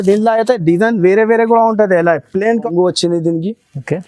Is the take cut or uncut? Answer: cut